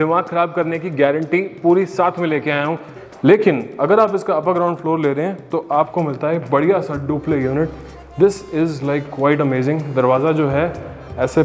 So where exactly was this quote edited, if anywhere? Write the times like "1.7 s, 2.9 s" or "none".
2.9 s